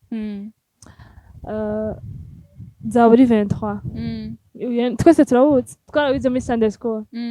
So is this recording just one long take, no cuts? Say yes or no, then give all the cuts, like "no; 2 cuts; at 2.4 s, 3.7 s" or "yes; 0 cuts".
yes; 0 cuts